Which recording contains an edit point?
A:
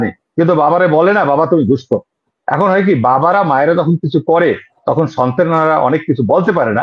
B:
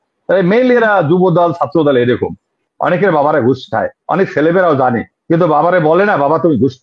B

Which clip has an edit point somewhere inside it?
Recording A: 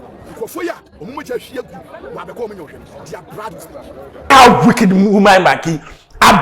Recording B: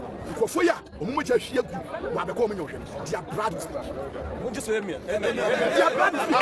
A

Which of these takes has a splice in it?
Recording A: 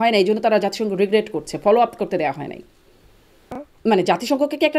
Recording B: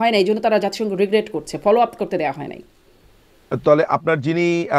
A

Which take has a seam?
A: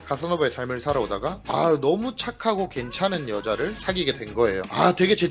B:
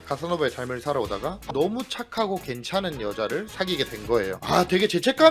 B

